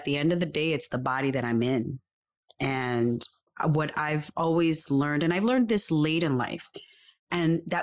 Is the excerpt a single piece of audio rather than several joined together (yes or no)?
no